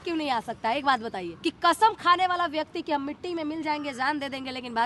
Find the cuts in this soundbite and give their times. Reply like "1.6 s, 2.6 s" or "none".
1.3 s

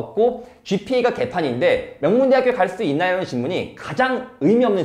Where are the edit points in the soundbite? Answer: none

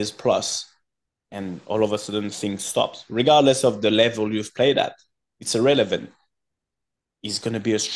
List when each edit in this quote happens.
none

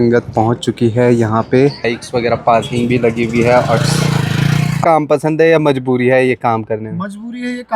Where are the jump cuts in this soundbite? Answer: 1.9 s, 4.8 s

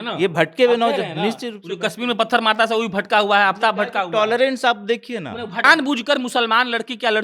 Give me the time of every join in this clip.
5.6 s

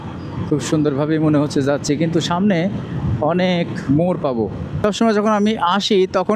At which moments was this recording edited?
4.6 s

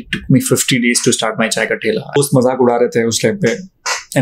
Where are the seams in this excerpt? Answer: 2.2 s

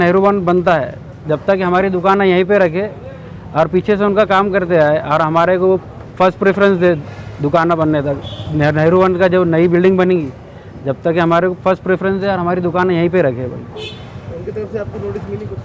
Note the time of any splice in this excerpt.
none

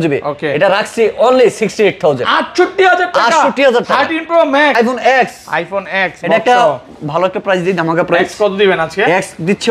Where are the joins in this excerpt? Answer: 4.7 s

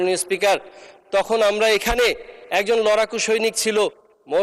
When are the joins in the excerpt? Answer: none

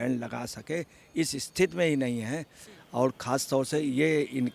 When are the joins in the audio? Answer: 2.6 s

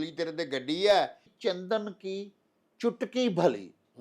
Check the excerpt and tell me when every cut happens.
1.3 s

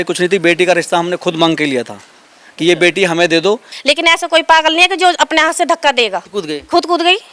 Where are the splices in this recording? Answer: 3.7 s, 6.3 s

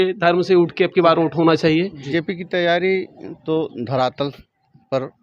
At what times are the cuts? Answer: 2.0 s

